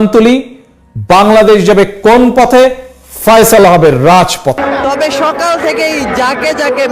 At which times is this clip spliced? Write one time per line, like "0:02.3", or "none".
0:04.6

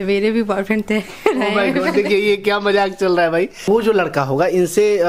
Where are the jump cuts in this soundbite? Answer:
0:03.6

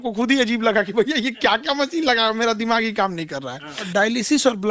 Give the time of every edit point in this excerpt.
0:03.8

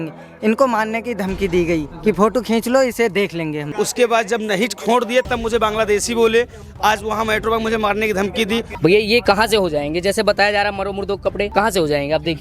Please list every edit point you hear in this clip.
0:01.9
0:03.6
0:08.7
0:11.5

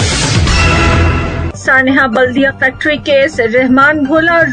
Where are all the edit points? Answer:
0:01.5

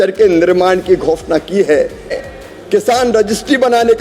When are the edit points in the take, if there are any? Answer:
0:02.2

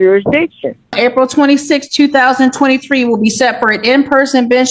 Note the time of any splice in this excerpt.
0:00.9

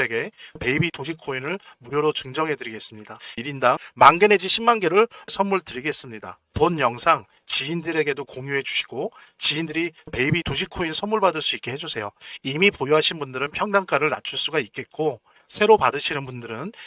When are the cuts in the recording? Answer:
0:03.4

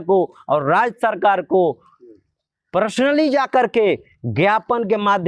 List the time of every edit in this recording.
none

